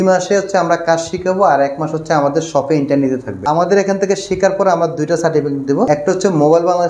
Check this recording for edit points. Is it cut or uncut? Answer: cut